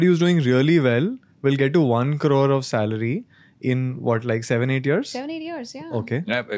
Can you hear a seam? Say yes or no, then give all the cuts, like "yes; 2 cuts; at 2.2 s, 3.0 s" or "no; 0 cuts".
no; 0 cuts